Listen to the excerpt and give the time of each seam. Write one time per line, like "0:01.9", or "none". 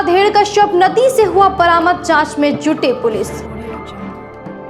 none